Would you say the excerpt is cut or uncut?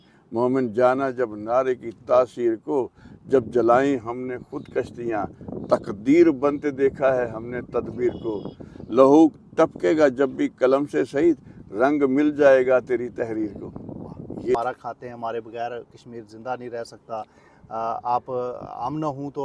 cut